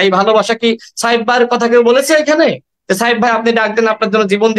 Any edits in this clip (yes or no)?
no